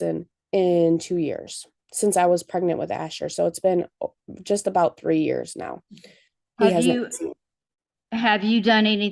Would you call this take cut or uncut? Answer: uncut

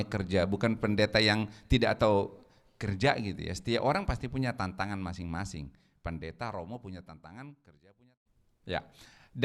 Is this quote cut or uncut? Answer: cut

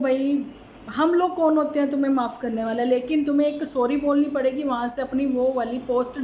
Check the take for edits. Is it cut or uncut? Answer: uncut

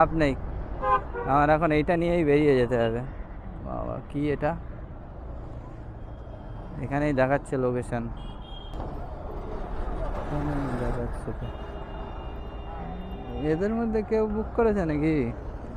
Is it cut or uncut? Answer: uncut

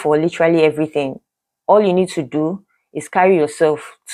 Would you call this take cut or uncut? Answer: uncut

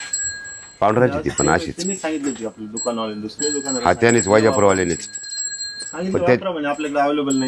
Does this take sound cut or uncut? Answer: cut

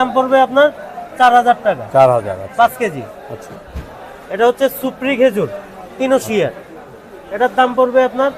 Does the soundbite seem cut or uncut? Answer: uncut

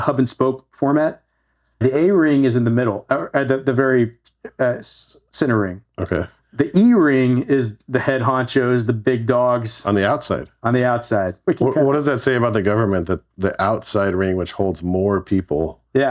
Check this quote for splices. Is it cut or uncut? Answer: cut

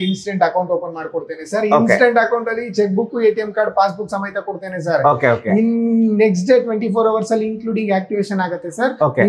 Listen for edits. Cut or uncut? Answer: uncut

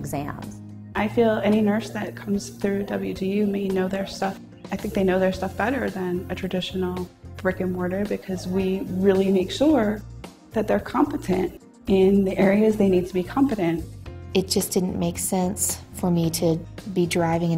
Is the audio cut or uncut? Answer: cut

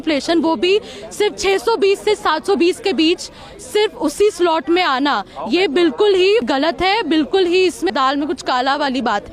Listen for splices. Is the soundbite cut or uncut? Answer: cut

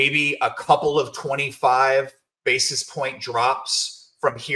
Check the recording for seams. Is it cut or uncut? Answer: uncut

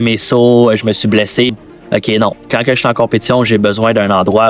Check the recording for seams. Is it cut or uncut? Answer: cut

